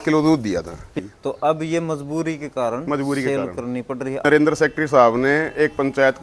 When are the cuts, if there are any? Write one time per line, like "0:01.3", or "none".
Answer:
0:01.0
0:04.2